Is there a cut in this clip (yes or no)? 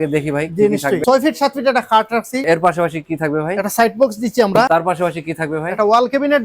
yes